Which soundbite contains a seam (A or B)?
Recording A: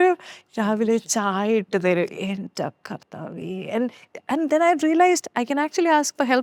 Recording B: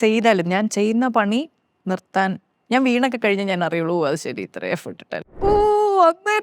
B